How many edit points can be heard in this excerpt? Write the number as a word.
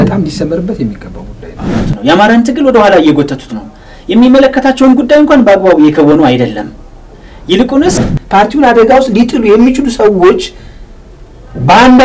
two